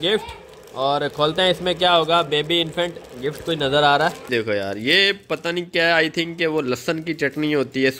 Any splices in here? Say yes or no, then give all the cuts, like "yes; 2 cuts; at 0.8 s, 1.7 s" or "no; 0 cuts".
yes; 1 cut; at 4.3 s